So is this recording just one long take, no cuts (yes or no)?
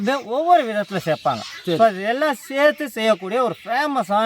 yes